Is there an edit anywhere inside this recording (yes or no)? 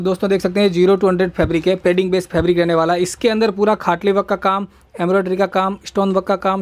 no